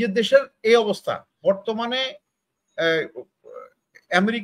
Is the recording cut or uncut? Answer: cut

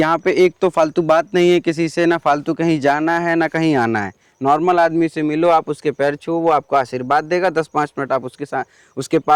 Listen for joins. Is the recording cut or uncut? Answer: uncut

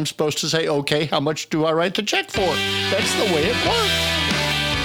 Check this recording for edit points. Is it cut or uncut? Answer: cut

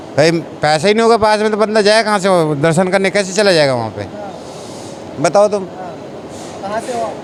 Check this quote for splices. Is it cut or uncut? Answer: uncut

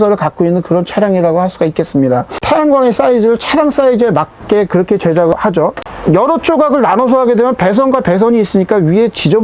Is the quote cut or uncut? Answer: uncut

